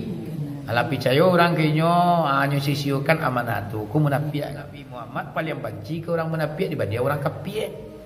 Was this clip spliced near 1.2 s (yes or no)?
no